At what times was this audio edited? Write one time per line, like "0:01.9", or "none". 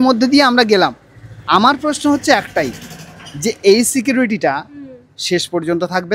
none

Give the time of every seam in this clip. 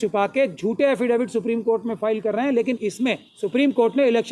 0:03.3

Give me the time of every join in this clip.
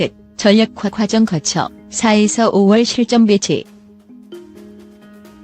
0:03.7

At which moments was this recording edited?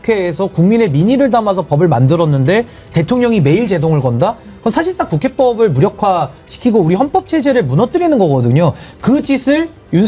none

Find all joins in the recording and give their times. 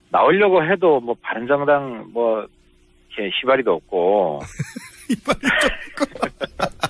none

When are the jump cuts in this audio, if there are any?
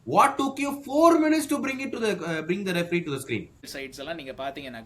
0:03.7

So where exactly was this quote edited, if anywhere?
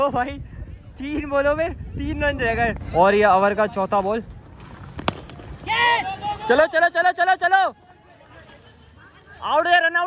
0:02.8

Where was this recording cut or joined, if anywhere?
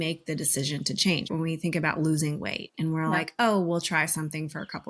0:01.3

